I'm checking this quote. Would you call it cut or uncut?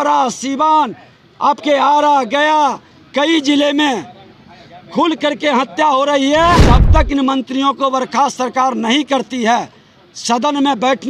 cut